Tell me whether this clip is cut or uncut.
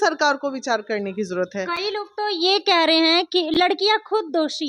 uncut